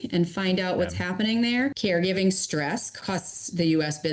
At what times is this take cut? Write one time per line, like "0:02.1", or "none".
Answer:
0:01.8
0:02.9